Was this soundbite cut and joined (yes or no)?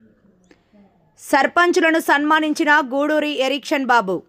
no